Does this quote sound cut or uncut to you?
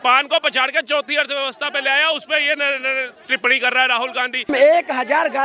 cut